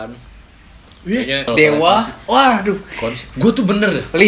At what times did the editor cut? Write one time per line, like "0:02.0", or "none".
0:01.5

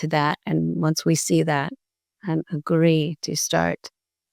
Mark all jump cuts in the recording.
none

